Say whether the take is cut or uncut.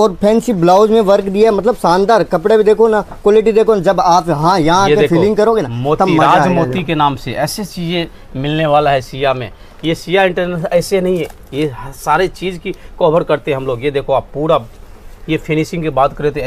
uncut